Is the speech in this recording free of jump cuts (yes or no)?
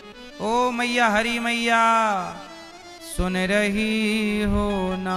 yes